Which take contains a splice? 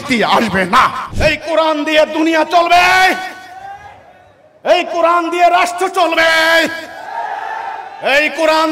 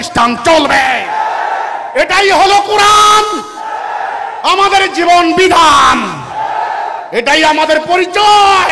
first; 1 cut; at 1.1 s

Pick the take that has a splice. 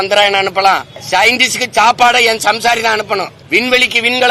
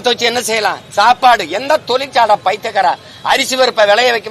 first; 2 cuts; at 0.9 s, 3.4 s

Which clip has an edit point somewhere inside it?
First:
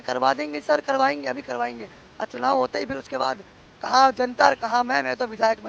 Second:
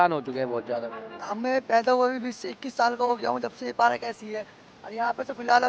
second; 1 cut; at 1.0 s

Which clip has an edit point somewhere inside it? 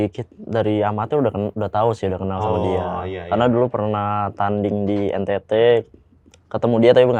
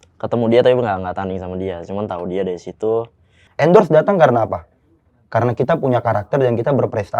second; 1 cut; at 3.4 s

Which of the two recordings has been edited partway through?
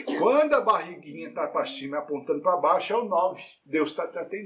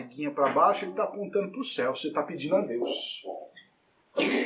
first; 1 cut; at 3.5 s

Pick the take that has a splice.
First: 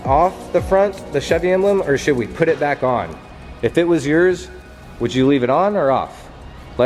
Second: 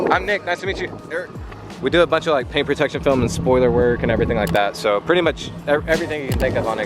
second; 1 cut; at 1.7 s

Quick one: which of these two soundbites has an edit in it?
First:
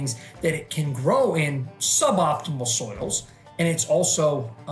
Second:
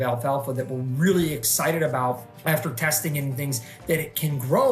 second; 1 cut; at 2.3 s

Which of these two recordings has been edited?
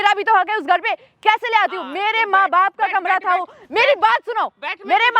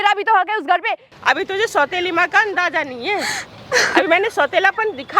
second; 1 cut; at 1.1 s

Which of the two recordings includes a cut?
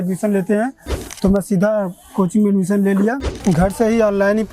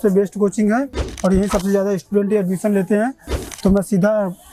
first; 1 cut; at 3.3 s

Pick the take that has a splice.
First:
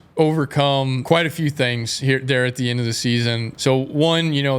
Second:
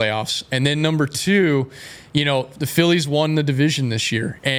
first; 2 cuts; at 1.0 s, 3.5 s

